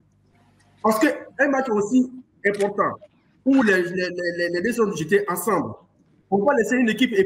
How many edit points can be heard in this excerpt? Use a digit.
0